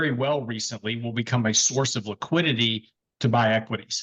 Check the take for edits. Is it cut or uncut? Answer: uncut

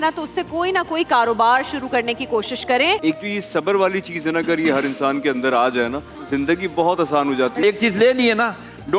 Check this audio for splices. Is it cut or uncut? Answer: cut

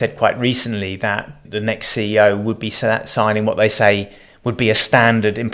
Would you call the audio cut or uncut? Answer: cut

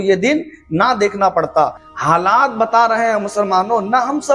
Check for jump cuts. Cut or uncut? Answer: cut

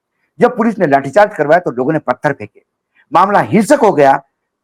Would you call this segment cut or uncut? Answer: uncut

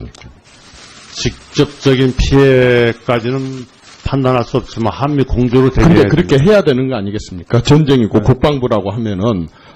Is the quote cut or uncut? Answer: cut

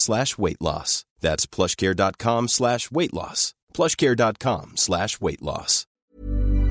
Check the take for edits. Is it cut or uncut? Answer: cut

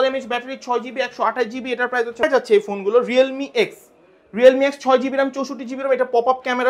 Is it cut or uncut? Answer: cut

